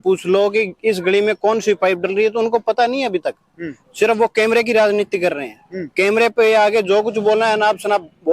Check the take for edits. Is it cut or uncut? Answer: uncut